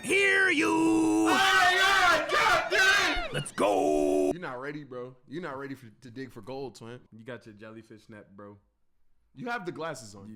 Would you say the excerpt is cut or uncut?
cut